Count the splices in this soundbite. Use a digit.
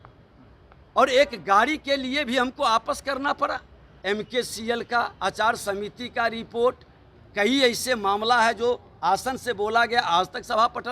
1